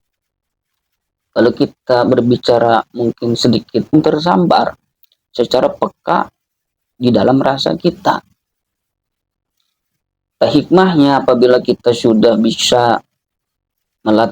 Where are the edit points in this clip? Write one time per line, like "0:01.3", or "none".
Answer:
0:03.9